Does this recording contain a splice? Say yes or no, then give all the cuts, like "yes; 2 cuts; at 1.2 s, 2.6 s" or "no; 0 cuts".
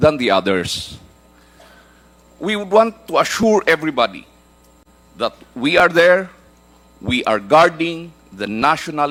no; 0 cuts